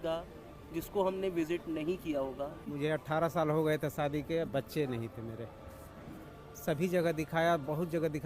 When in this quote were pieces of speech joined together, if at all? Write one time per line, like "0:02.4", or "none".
0:02.6